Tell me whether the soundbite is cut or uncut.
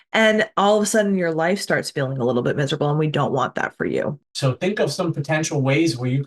cut